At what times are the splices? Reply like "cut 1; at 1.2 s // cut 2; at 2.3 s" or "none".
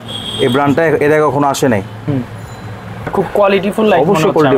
cut 1; at 3.1 s